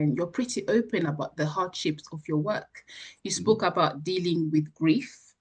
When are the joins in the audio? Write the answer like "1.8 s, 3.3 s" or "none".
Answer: none

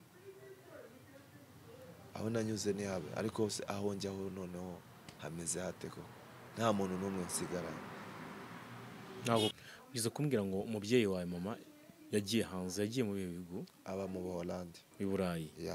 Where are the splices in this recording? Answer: 9.5 s, 14.8 s

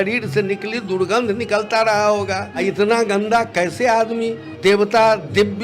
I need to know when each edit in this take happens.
2.5 s, 4.4 s

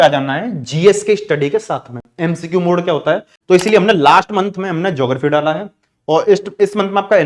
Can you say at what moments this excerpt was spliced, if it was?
3.3 s

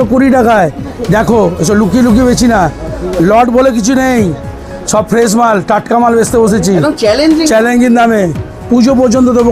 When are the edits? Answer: none

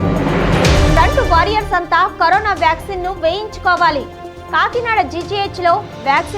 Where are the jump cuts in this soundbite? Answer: 0.9 s

